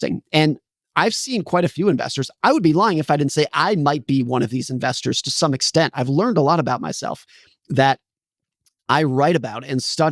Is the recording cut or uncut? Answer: uncut